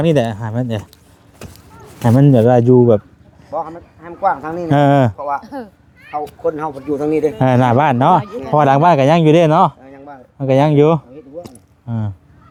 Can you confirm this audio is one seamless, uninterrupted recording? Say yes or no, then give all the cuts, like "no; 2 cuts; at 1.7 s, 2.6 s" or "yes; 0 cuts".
yes; 0 cuts